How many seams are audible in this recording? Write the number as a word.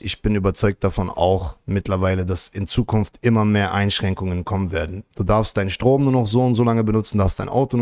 zero